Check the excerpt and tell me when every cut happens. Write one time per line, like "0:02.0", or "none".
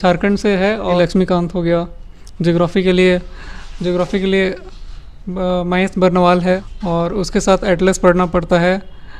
0:01.0
0:06.6

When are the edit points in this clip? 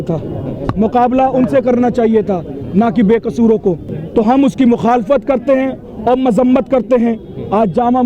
0:03.9

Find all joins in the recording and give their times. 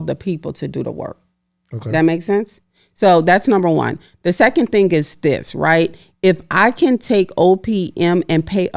none

